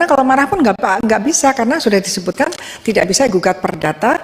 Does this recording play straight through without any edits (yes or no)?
yes